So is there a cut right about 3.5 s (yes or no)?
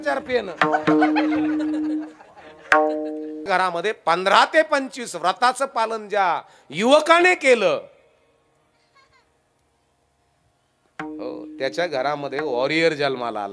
yes